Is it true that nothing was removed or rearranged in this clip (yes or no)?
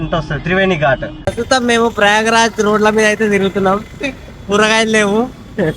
no